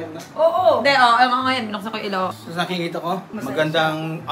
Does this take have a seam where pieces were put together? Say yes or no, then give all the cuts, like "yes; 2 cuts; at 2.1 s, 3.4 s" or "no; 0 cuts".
yes; 2 cuts; at 1.5 s, 3.2 s